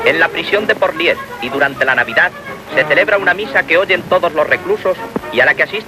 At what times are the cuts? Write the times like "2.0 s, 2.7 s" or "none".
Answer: 1.9 s